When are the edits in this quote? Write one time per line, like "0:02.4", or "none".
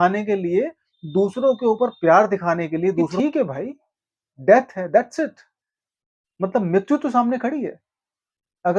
0:03.1